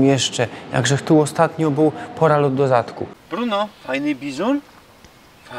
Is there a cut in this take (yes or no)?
yes